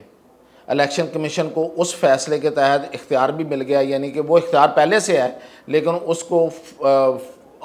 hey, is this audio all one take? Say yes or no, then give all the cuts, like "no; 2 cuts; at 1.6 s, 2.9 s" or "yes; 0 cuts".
yes; 0 cuts